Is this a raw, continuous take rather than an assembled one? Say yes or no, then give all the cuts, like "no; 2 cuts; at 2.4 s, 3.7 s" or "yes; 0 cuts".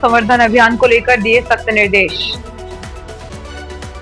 yes; 0 cuts